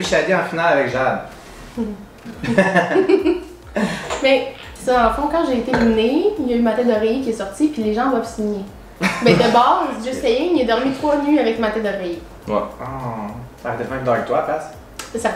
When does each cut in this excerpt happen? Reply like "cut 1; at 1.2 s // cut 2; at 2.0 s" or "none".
none